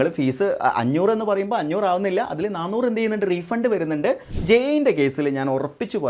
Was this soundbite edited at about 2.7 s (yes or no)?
no